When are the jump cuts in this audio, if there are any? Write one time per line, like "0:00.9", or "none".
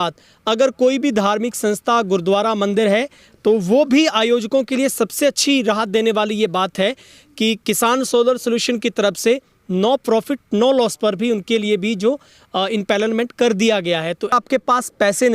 0:14.3